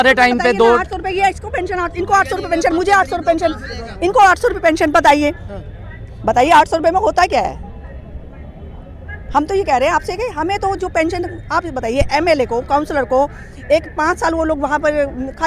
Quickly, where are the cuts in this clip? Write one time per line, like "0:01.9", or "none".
none